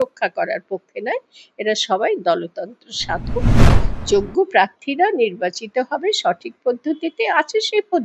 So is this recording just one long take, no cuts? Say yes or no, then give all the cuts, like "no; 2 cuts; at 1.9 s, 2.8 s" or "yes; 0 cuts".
no; 1 cut; at 3.6 s